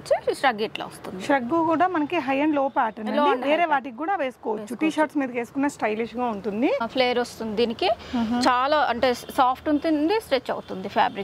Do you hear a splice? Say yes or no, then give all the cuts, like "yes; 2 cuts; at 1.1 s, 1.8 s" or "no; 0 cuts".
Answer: yes; 1 cut; at 6.9 s